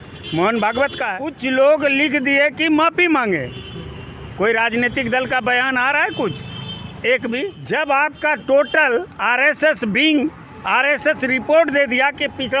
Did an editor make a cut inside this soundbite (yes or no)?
yes